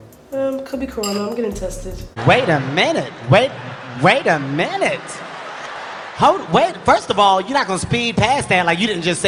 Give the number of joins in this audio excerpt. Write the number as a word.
zero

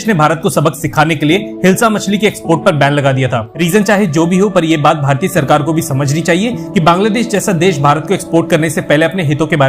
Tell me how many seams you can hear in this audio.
one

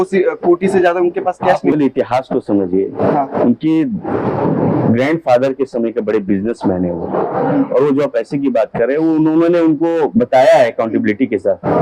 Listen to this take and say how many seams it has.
zero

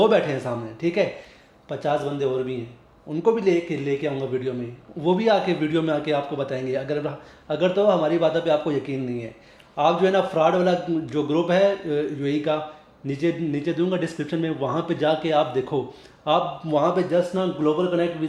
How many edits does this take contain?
zero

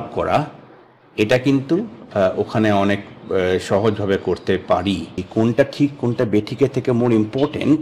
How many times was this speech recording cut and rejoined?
one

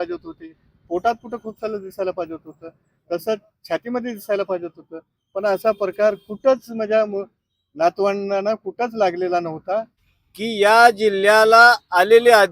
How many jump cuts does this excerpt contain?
one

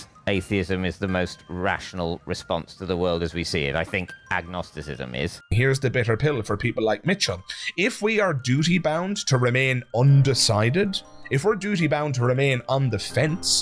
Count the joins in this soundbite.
one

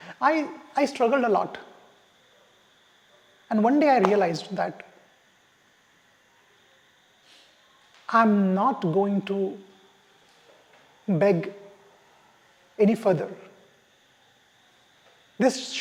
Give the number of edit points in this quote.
zero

